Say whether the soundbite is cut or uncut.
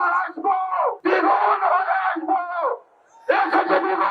cut